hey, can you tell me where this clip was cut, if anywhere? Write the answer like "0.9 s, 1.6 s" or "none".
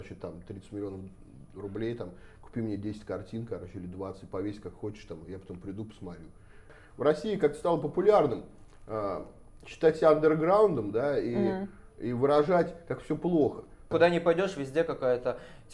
6.7 s, 13.9 s